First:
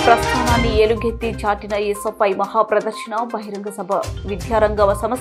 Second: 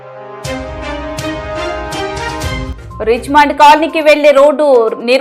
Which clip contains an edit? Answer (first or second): second